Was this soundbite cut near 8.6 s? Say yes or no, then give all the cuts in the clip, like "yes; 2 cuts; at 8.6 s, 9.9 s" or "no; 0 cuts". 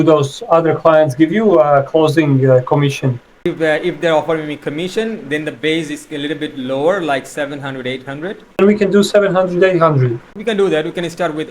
yes; 3 cuts; at 3.4 s, 8.6 s, 10.3 s